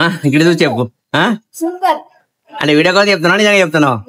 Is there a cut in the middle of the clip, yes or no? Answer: no